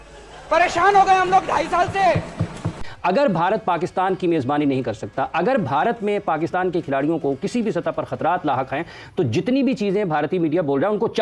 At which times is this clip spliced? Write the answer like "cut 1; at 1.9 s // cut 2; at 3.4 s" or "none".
cut 1; at 2.7 s